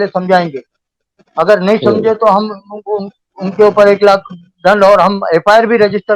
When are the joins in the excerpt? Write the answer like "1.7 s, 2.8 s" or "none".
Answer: none